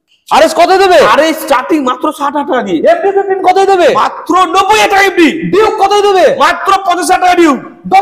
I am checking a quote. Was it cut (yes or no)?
no